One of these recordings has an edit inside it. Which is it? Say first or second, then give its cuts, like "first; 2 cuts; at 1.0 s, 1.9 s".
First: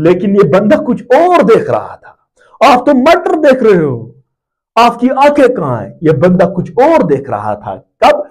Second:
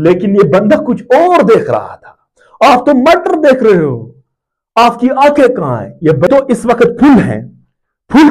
second; 1 cut; at 6.3 s